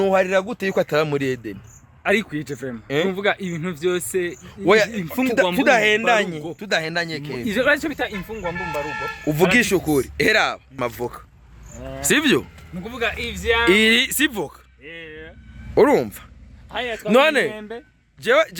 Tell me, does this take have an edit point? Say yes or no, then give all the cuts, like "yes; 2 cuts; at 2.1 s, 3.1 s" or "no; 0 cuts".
no; 0 cuts